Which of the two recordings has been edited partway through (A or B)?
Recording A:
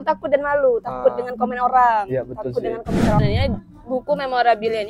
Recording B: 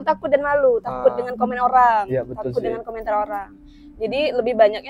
A